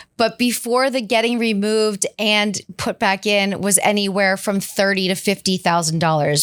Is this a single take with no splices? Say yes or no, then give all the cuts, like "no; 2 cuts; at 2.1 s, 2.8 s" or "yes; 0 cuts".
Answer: yes; 0 cuts